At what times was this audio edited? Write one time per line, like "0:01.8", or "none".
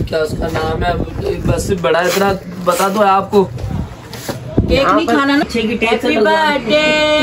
0:03.4
0:05.4